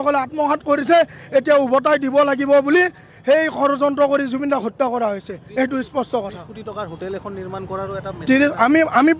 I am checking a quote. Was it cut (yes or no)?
no